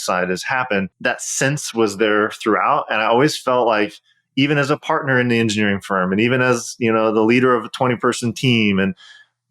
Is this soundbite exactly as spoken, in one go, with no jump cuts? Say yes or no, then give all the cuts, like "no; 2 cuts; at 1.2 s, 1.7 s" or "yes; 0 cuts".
no; 1 cut; at 0.9 s